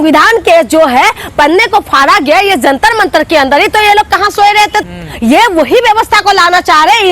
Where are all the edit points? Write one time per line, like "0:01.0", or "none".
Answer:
0:04.8

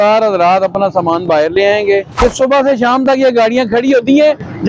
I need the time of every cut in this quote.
0:02.1

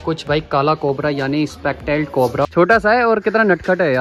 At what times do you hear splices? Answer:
0:02.5

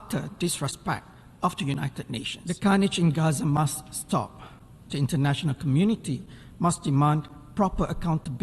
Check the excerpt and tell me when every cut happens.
0:02.3

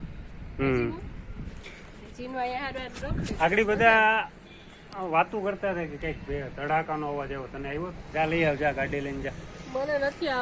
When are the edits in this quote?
0:08.0

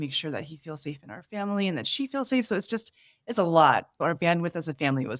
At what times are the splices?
0:03.9

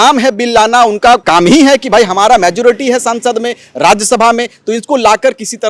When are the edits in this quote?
0:01.2

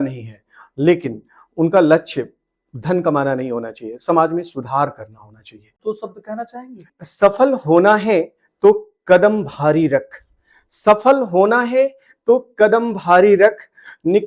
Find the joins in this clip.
0:05.8
0:07.0

